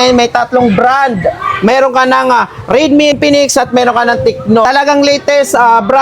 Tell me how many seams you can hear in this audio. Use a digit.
2